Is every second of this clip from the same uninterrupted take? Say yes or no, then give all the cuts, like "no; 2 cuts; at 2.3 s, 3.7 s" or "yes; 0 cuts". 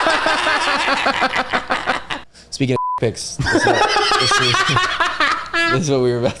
no; 1 cut; at 2.1 s